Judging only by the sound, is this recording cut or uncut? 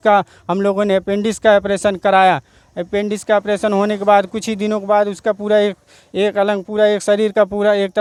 uncut